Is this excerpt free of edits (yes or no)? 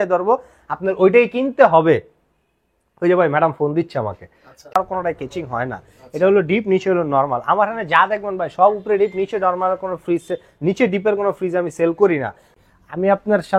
no